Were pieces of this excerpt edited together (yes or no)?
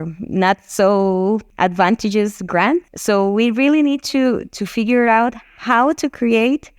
yes